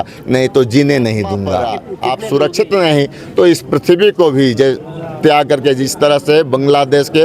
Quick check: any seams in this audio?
yes; 1 cut; at 1.9 s

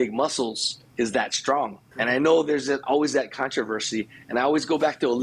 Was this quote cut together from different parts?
no; 0 cuts

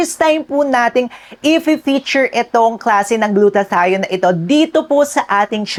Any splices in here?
no; 0 cuts

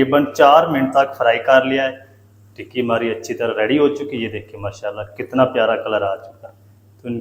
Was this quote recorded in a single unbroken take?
yes; 0 cuts

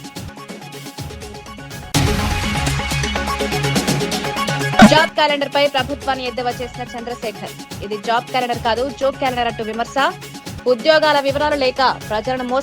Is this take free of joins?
no; 2 cuts; at 1.9 s, 4.8 s

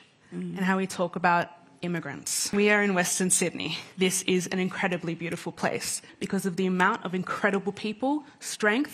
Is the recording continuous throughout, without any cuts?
no; 3 cuts; at 2.4 s, 3.8 s, 6.1 s

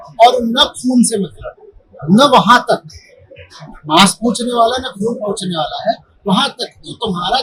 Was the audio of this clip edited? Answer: no; 0 cuts

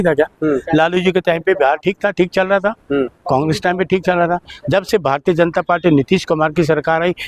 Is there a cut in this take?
no; 0 cuts

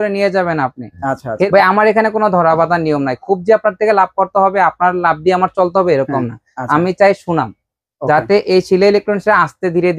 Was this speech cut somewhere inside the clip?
yes; 1 cut; at 1.5 s

